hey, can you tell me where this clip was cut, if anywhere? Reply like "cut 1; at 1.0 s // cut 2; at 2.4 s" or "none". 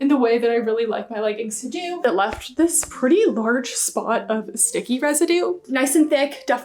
cut 1; at 2.0 s // cut 2; at 5.6 s